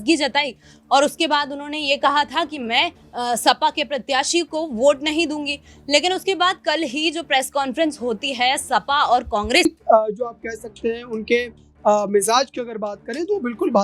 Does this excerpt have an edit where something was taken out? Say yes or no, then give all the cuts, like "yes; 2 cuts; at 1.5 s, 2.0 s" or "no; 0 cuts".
yes; 1 cut; at 9.6 s